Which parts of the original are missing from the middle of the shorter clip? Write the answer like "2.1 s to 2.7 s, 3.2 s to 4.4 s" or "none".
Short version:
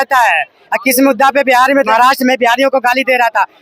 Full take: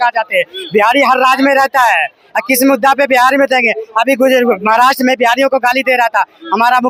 3.5 s to 4.7 s

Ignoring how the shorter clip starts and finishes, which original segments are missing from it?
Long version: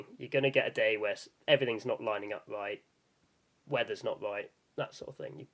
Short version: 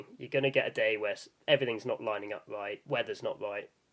2.8 s to 3.6 s

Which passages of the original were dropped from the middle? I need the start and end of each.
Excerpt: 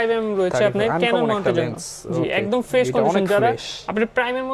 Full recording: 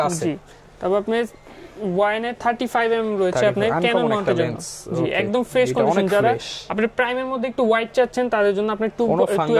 none

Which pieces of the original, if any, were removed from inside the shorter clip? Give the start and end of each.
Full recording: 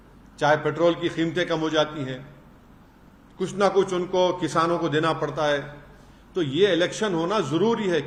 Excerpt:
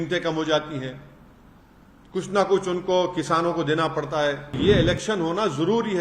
5.8 s to 6.5 s

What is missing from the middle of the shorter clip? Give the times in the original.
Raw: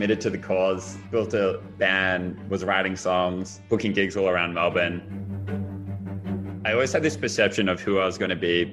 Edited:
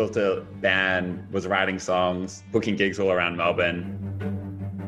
5.0 s to 5.1 s

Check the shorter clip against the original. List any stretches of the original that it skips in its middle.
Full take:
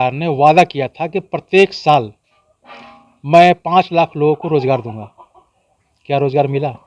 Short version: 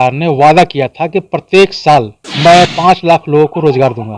2.2 s to 3.1 s

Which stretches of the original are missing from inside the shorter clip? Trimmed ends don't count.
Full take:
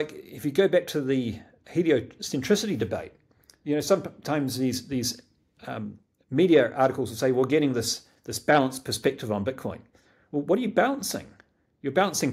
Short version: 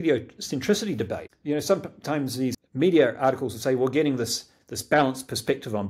3.1 s to 3.5 s, 4.8 s to 6.2 s

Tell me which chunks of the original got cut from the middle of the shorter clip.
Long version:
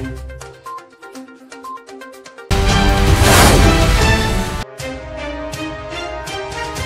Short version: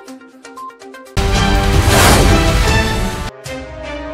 2.2 s to 2.4 s

